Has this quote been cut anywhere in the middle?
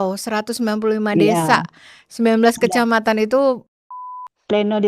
yes; 1 cut; at 3.9 s

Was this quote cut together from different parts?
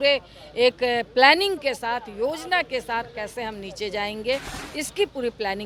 no; 0 cuts

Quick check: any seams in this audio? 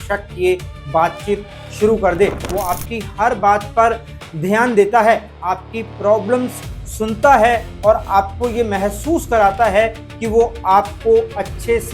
yes; 1 cut; at 2.4 s

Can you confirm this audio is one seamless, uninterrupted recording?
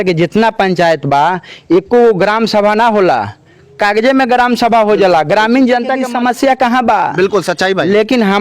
no; 1 cut; at 6.0 s

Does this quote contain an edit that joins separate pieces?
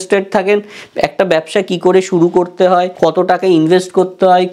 yes; 1 cut; at 2.9 s

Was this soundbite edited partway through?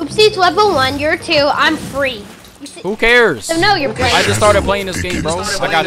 no; 0 cuts

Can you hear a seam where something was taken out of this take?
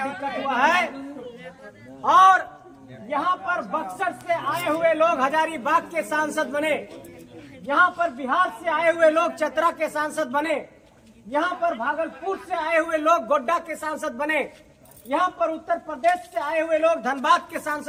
no; 0 cuts

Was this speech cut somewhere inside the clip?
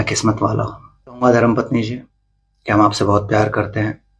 yes; 1 cut; at 1.2 s

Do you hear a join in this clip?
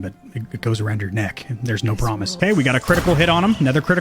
yes; 1 cut; at 2.3 s

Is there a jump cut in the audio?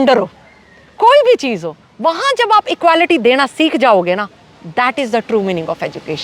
no; 0 cuts

